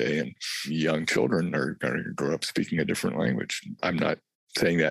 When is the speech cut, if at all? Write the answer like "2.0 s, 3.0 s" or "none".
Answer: none